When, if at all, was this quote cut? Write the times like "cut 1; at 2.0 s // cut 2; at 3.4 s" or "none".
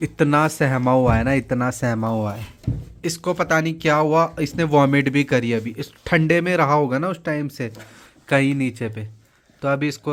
none